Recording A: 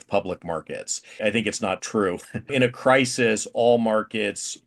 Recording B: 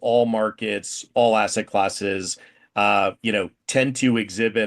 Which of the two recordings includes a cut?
A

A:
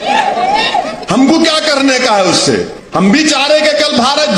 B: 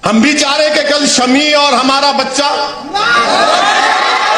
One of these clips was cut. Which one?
A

